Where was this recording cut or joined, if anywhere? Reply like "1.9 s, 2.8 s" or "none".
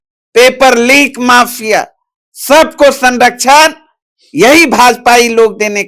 none